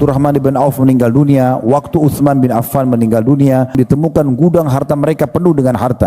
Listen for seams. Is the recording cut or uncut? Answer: cut